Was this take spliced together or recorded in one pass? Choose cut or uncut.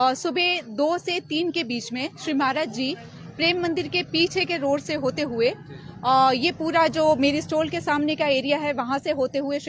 uncut